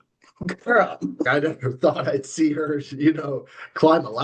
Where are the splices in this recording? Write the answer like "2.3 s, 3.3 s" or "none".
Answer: 1.3 s